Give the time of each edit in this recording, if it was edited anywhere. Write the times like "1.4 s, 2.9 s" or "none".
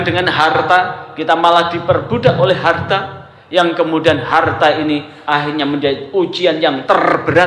none